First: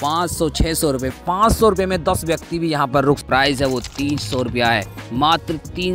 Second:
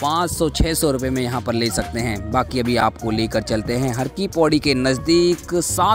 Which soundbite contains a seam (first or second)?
first